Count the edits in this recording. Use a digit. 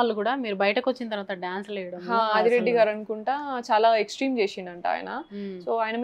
0